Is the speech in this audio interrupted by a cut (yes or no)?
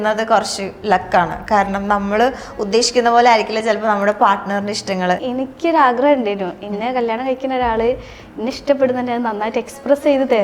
yes